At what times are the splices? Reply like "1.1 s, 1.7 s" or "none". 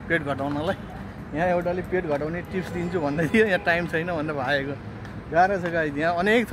none